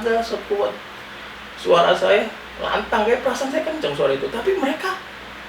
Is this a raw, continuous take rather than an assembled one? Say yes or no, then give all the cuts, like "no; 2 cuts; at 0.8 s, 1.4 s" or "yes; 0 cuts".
yes; 0 cuts